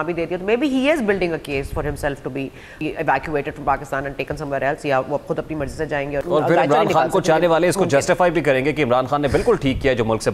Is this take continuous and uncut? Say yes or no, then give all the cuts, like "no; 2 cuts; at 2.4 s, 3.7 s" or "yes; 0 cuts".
no; 2 cuts; at 2.7 s, 6.2 s